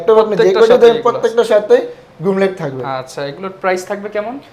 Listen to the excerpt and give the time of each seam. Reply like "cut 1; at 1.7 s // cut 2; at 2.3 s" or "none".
none